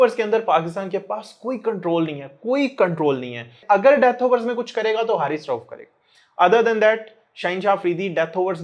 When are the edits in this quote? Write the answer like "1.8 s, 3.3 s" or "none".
3.5 s